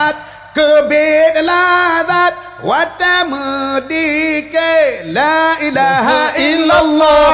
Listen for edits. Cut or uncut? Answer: uncut